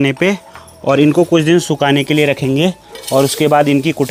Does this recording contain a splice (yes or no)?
no